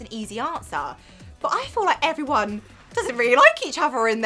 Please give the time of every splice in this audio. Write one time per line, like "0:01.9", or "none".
none